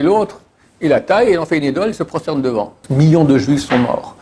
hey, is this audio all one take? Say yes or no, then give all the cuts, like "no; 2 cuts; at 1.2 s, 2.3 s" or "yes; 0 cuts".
no; 1 cut; at 2.8 s